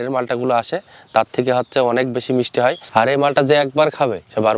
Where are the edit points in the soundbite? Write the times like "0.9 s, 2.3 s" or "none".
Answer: 2.8 s